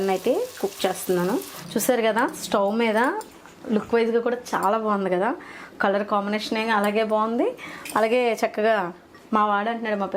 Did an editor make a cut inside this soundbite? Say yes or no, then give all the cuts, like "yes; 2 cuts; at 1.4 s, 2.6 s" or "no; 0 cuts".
yes; 1 cut; at 1.6 s